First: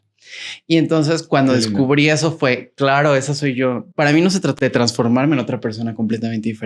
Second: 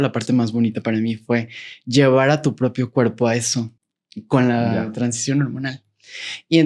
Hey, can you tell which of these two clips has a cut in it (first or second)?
first